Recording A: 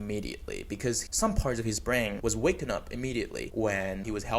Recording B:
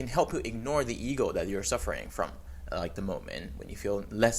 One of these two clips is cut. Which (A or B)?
A